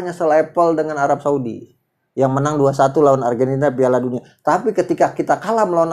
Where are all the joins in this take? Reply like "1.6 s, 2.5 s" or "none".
none